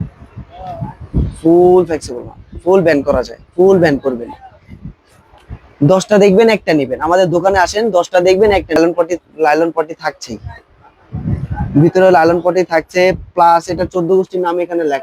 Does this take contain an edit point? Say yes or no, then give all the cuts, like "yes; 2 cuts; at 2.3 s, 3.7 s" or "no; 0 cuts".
yes; 1 cut; at 8.8 s